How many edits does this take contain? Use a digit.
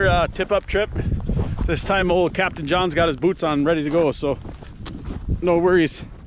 0